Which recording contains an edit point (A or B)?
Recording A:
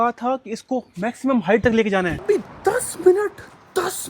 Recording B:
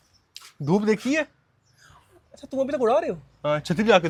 A